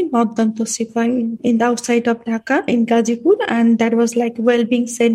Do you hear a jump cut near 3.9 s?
no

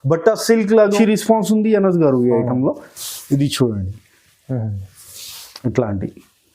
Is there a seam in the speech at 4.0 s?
no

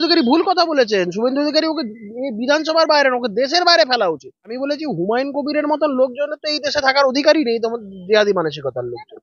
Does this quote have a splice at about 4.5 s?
yes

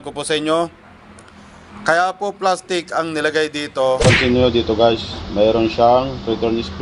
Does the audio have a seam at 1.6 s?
no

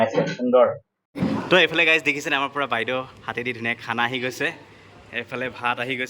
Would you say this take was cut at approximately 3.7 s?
no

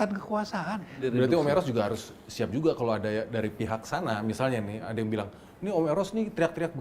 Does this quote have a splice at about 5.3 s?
no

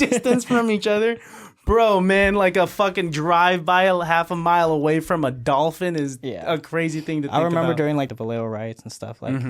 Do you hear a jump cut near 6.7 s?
no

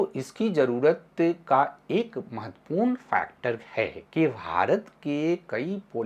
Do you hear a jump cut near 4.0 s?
yes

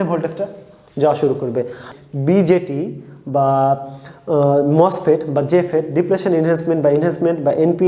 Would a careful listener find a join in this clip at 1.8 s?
yes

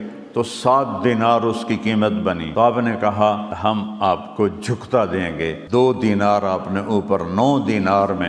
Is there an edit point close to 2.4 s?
yes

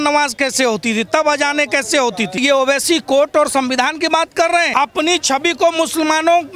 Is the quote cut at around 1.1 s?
no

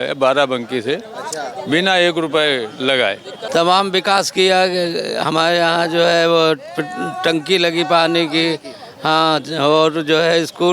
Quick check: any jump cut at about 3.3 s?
yes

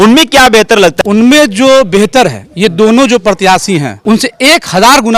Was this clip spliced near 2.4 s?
no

